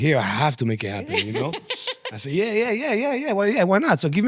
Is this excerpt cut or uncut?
uncut